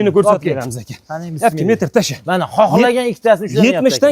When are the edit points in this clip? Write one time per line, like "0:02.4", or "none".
none